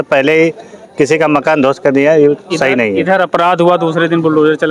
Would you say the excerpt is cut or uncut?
uncut